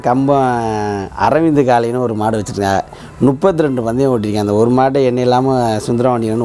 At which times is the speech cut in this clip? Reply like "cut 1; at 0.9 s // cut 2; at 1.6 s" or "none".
none